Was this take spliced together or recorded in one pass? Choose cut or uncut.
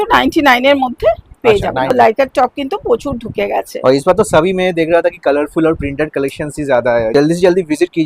cut